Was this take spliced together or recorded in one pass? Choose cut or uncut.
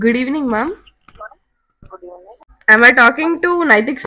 cut